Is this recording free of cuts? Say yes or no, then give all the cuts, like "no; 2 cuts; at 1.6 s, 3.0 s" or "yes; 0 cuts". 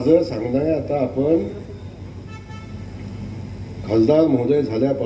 yes; 0 cuts